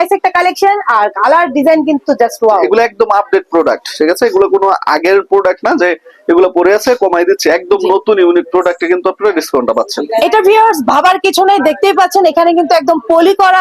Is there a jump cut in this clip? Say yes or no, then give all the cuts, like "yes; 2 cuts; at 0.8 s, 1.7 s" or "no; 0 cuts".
no; 0 cuts